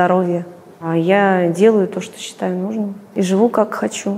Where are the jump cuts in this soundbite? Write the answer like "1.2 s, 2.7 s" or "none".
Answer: 0.9 s, 3.0 s